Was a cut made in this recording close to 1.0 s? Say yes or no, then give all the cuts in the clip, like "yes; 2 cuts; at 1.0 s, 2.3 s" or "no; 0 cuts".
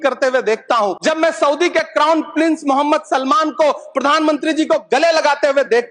yes; 1 cut; at 1.0 s